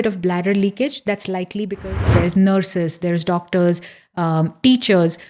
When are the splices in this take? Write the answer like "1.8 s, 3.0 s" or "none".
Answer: 1.8 s